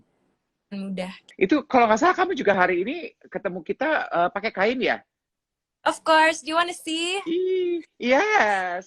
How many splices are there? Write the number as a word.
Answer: one